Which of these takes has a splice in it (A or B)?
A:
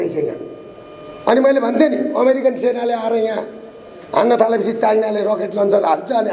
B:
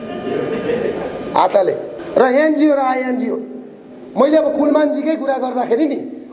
B